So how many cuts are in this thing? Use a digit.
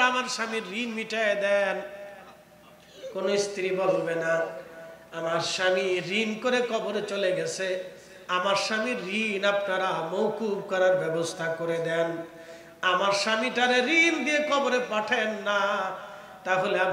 0